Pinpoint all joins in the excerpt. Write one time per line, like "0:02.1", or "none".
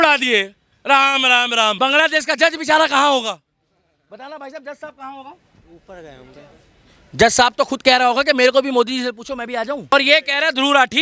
0:01.8
0:09.9